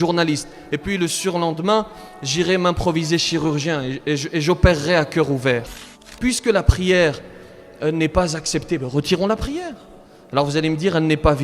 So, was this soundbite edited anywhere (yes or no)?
yes